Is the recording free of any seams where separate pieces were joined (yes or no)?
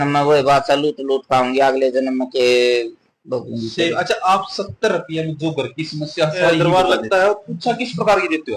no